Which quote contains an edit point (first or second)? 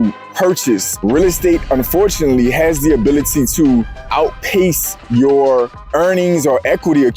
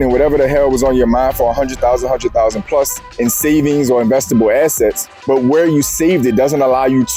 first